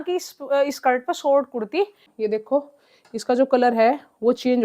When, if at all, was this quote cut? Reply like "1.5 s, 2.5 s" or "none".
2.1 s